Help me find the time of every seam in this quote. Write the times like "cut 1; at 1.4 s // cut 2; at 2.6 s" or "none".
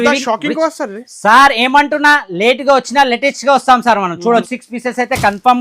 cut 1; at 4.6 s